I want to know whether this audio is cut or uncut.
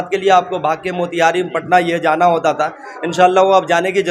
uncut